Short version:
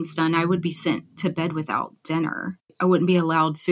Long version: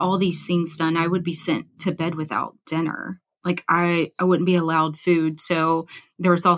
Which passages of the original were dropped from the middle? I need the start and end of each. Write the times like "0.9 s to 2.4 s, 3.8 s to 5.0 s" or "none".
3.4 s to 4.1 s